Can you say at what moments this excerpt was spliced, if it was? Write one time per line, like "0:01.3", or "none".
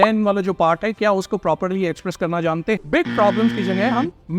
0:02.8